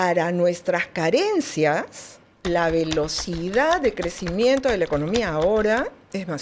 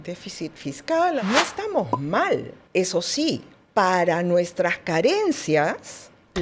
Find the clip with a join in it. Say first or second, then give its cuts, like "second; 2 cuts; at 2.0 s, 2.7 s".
second; 1 cut; at 1.2 s